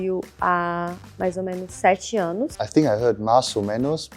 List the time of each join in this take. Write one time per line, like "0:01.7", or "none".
0:02.6